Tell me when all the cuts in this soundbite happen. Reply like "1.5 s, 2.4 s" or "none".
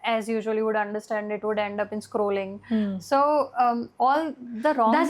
none